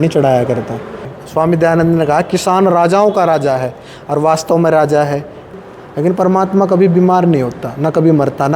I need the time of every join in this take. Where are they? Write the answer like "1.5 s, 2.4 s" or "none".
1.1 s, 5.5 s